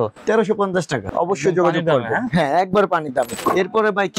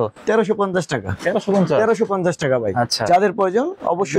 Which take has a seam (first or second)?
first